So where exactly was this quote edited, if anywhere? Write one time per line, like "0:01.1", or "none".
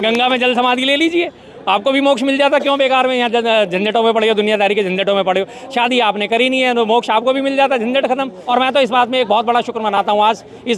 0:08.4